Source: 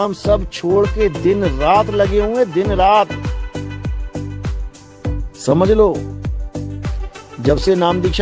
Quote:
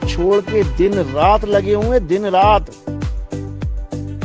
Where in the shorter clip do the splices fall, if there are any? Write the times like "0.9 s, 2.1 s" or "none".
3.3 s

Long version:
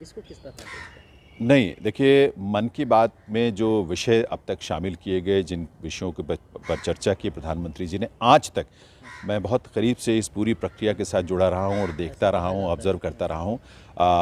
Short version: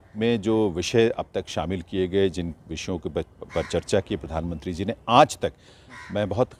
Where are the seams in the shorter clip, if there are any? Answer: none

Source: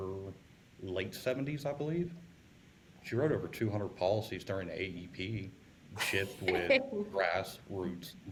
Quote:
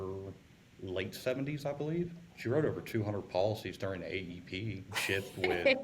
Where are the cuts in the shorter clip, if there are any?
2.3 s, 4.9 s

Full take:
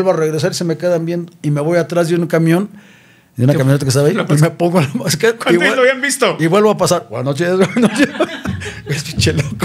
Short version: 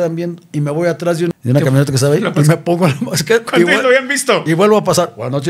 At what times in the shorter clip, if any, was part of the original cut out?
1.3 s

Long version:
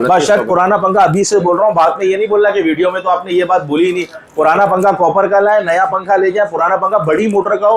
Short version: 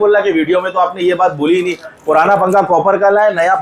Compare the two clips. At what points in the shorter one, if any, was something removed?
none

